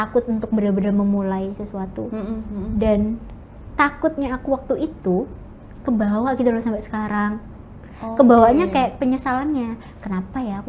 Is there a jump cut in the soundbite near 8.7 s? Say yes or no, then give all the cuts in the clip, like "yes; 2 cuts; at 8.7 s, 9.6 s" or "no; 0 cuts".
no; 0 cuts